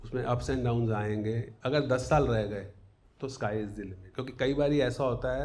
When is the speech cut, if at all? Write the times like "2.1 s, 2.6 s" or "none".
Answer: 1.5 s, 4.0 s